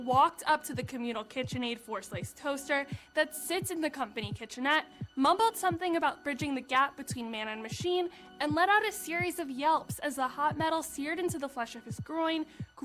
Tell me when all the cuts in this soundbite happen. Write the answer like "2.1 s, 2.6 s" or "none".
none